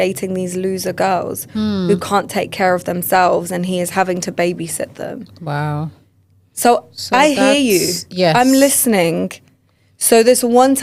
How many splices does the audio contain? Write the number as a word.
zero